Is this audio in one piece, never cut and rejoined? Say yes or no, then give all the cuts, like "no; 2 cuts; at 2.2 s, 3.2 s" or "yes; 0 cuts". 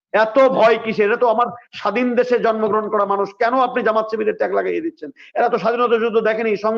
yes; 0 cuts